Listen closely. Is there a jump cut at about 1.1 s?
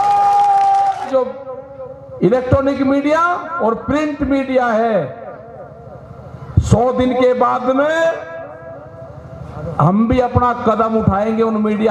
yes; 1 cut; at 1.1 s

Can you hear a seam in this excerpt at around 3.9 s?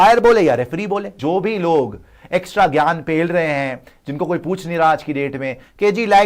no; 1 cut; at 1.1 s

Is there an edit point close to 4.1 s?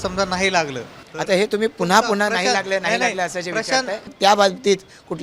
yes; 1 cut; at 4.1 s

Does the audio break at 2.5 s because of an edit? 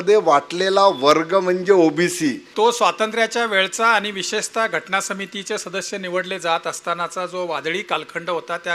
yes; 1 cut; at 2.5 s

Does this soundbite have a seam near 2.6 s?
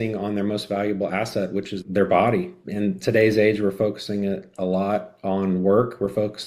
yes; 2 cuts; at 1.7 s, 2.6 s

